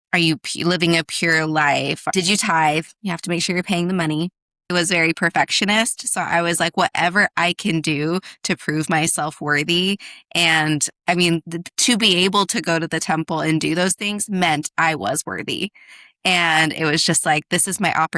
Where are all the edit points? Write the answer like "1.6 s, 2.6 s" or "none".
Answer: 2.1 s, 4.7 s